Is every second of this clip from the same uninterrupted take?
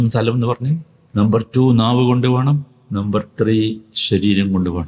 no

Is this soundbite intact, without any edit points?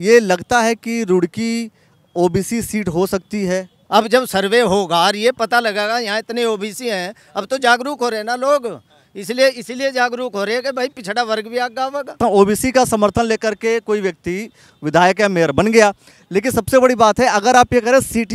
no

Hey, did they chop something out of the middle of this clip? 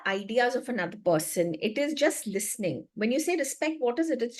no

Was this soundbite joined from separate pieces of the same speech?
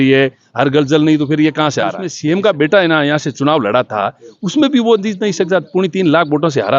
yes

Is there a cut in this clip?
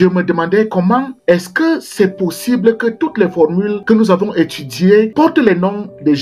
yes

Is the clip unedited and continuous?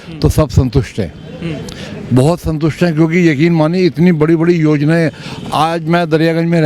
yes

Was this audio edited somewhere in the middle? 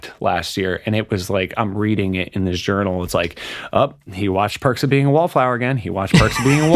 no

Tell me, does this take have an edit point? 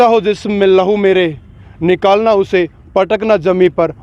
no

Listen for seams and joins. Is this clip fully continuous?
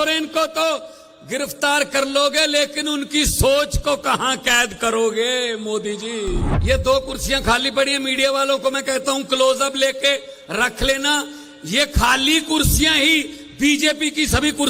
no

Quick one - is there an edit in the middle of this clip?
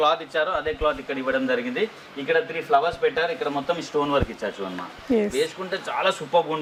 no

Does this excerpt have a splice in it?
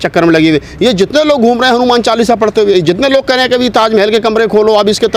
no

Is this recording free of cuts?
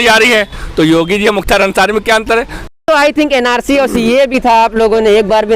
no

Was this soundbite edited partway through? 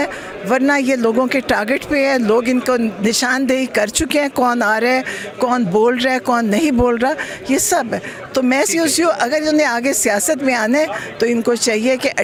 no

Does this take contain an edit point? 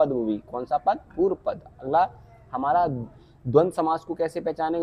no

